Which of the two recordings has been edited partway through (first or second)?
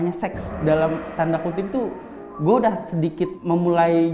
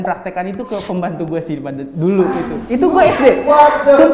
first